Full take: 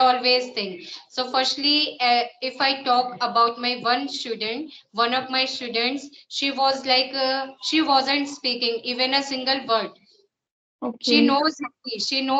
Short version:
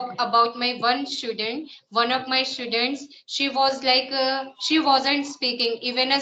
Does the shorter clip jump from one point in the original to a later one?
no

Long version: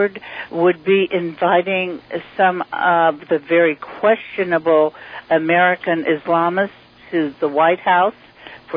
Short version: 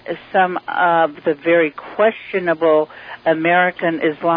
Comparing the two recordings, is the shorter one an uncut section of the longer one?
yes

